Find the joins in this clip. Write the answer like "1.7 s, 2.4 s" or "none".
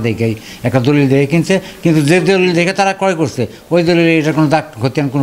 none